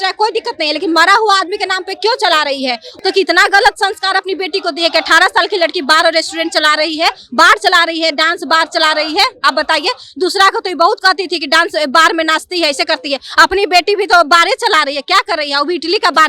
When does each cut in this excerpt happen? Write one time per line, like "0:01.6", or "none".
0:02.9